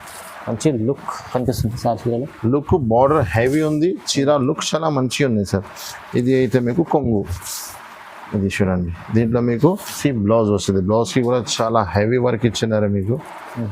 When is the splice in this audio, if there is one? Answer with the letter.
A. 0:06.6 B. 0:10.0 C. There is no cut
B